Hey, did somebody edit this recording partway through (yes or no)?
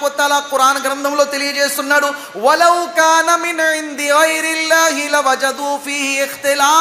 no